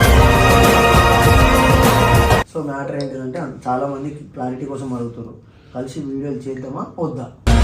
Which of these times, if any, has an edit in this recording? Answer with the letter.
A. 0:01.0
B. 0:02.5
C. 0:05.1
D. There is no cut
B